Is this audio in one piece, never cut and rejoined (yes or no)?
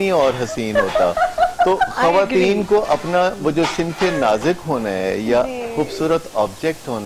yes